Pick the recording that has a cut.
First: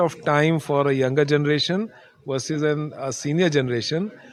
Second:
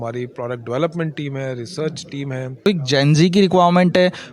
second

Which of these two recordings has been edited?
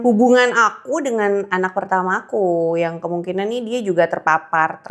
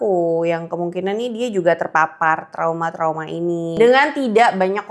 second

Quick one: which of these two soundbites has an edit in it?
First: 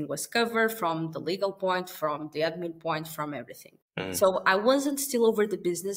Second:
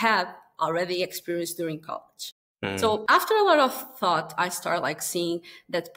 first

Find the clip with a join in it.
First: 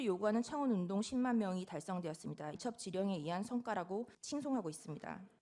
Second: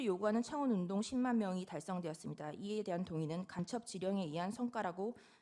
first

